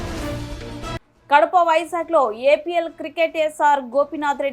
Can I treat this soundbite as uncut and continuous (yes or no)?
no